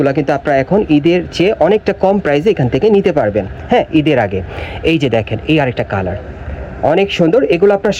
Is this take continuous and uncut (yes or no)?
yes